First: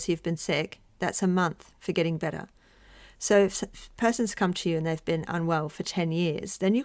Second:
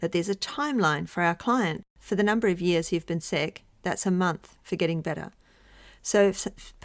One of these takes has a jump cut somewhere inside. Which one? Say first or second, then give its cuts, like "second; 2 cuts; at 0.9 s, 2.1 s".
second; 1 cut; at 1.8 s